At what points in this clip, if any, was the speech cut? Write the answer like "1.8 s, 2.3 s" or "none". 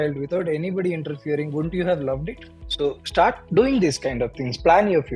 2.5 s